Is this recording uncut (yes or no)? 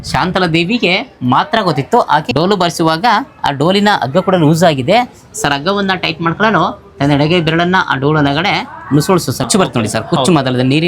no